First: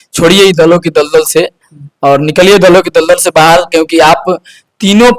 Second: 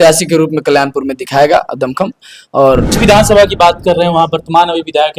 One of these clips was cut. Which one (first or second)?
second